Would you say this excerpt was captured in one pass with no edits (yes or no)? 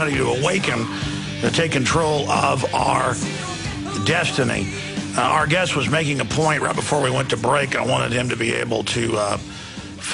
yes